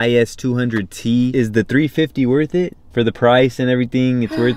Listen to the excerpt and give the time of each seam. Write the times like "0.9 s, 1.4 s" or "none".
1.3 s, 2.8 s